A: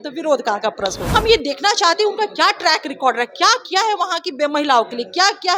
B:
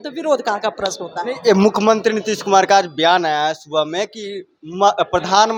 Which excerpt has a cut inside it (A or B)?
A